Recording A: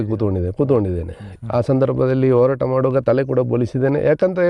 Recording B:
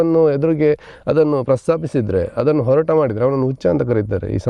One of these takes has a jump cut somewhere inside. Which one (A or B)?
A